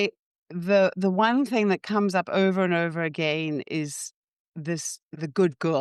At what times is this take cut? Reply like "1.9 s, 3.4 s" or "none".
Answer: none